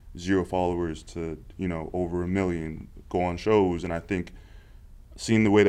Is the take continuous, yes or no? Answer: yes